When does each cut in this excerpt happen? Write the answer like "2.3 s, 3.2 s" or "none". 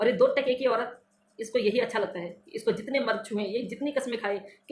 none